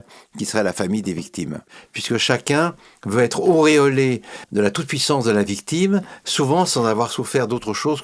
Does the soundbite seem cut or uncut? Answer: cut